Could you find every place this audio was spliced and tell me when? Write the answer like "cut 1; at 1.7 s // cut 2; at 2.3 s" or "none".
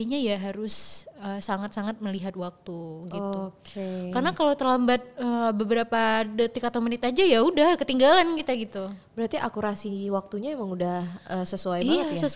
none